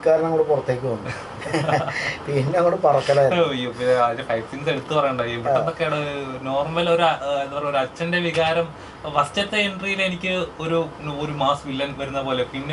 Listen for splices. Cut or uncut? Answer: uncut